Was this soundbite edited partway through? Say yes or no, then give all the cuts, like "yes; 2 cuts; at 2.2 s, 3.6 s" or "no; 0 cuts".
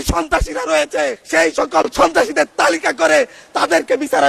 yes; 1 cut; at 1.2 s